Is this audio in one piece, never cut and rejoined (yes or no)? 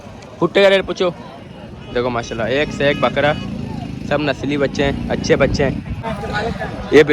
no